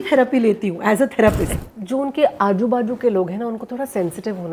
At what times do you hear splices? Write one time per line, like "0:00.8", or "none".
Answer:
0:01.5